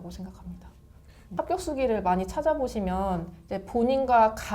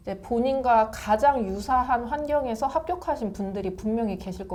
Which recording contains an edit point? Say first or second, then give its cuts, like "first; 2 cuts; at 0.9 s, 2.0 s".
first; 1 cut; at 1.1 s